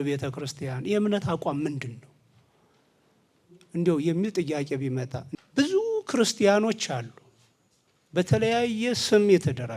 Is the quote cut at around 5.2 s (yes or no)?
yes